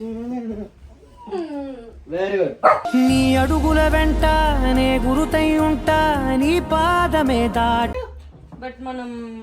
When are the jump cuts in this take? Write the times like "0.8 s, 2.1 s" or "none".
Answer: 7.9 s